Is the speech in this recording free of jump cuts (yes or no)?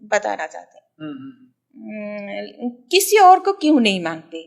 yes